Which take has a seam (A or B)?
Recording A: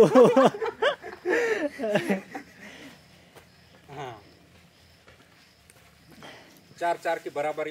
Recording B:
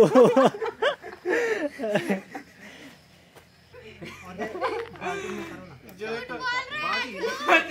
B